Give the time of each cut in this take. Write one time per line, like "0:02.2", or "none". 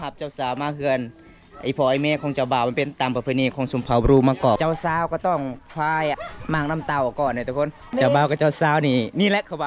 0:04.6
0:06.2
0:07.9